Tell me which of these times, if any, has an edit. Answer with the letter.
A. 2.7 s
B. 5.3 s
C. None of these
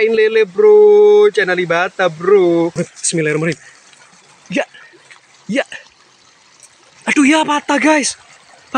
A